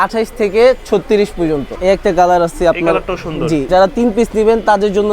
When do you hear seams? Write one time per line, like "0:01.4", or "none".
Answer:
0:01.7
0:03.7